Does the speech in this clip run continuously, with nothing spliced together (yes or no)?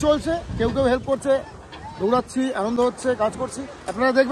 yes